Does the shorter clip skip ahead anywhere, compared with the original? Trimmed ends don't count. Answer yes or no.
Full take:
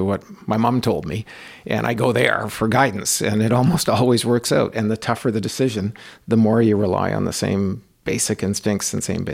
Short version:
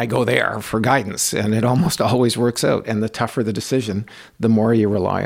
no